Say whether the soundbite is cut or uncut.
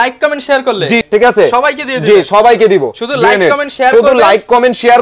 cut